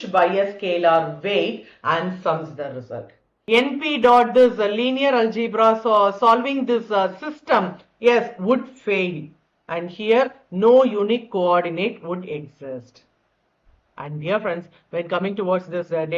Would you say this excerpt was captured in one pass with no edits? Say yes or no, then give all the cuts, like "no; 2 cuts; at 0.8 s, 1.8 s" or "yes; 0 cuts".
no; 1 cut; at 3.3 s